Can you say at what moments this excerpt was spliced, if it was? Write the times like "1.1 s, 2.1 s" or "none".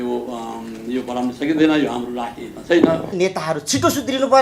3.1 s